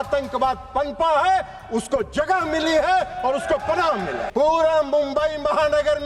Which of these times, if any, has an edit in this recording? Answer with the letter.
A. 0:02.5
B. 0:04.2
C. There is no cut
B